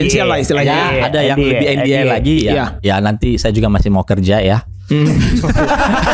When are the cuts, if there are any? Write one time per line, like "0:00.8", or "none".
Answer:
none